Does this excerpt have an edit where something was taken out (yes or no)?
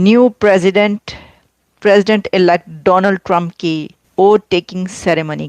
yes